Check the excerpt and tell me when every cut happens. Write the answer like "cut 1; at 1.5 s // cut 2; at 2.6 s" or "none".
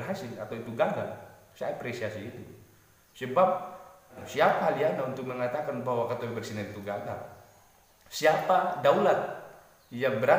cut 1; at 4.2 s